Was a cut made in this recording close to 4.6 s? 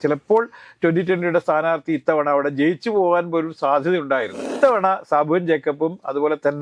yes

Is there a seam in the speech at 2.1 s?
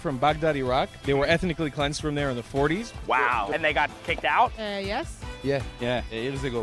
no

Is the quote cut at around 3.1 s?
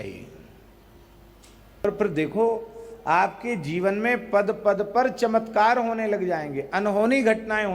no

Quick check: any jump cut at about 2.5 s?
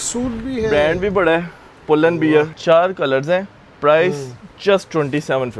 yes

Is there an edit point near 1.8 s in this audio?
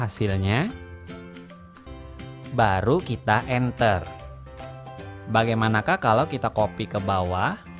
yes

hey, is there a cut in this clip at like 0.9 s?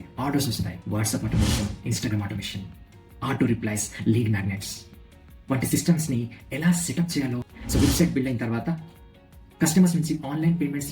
yes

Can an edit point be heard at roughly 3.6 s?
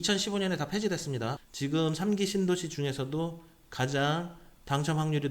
no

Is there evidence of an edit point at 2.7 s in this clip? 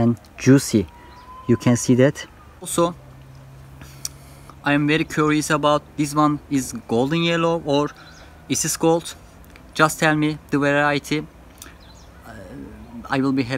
yes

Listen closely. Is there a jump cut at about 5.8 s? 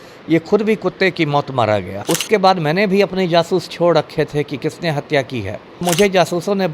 yes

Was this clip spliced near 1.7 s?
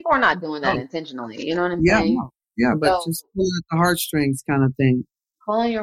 no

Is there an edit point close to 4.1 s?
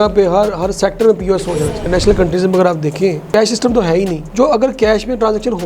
no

